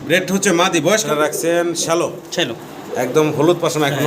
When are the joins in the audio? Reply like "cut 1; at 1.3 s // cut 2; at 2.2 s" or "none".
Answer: cut 1; at 1.1 s